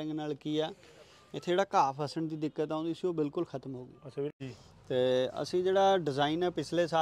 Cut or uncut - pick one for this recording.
cut